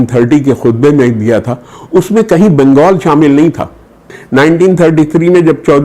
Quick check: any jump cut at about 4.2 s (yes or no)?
yes